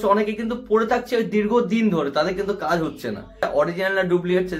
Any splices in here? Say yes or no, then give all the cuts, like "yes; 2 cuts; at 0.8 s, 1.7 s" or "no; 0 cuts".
yes; 1 cut; at 3.4 s